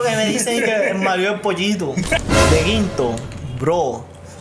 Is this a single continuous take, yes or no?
no